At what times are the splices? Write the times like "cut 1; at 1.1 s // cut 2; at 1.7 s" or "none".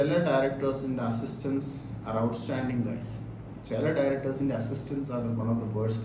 none